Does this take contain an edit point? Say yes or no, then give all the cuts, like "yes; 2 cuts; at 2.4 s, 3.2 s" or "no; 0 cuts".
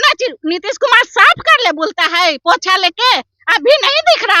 no; 0 cuts